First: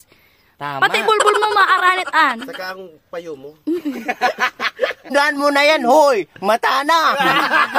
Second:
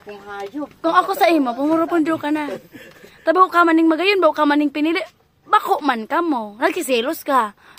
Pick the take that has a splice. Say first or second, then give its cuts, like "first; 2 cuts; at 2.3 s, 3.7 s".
first; 1 cut; at 5.1 s